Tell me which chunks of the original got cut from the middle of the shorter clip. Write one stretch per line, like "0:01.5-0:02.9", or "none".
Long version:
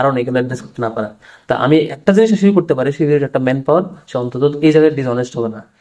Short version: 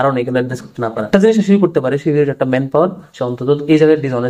0:01.0-0:02.0